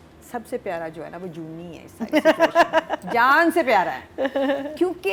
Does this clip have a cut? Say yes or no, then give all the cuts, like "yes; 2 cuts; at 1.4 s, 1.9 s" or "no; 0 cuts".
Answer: no; 0 cuts